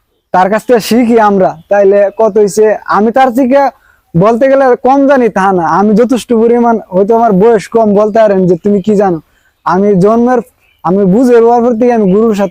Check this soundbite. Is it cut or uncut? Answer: uncut